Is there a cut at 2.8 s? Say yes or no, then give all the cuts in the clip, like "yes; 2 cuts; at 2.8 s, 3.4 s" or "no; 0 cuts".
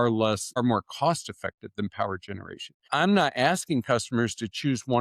yes; 1 cut; at 2.8 s